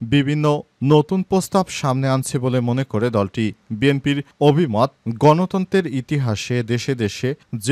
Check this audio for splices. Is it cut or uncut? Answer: uncut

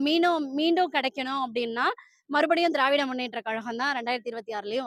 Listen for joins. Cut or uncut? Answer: uncut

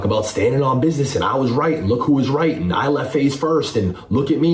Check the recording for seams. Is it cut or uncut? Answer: uncut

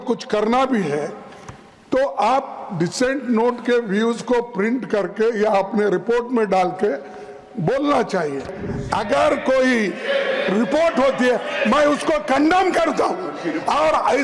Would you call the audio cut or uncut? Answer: cut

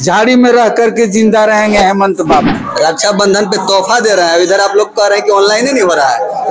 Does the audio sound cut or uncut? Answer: cut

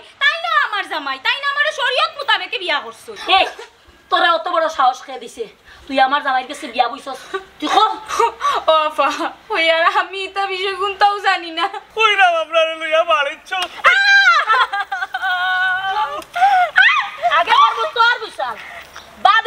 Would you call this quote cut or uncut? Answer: cut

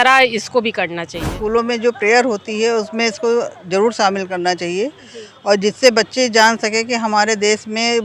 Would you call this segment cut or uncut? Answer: cut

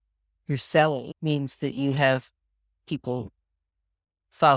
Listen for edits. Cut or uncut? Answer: cut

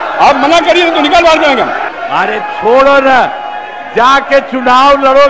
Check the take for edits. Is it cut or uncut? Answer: cut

